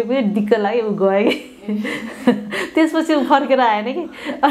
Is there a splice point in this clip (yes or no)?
no